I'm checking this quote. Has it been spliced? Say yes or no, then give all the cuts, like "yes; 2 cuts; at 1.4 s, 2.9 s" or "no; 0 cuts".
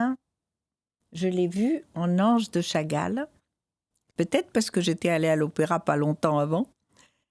yes; 1 cut; at 4.0 s